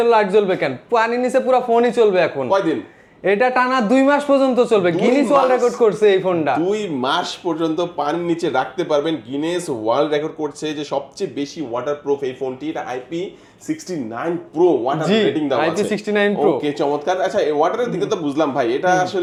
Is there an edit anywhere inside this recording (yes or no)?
no